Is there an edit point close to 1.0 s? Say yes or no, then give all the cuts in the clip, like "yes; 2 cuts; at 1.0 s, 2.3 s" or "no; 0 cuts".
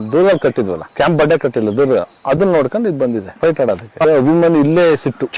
no; 1 cut; at 4.0 s